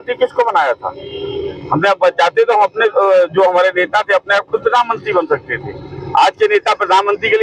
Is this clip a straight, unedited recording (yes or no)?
yes